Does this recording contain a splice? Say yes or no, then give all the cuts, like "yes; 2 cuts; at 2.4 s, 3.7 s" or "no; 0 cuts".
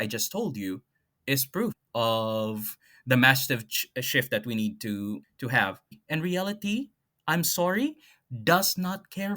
yes; 2 cuts; at 1.8 s, 5.7 s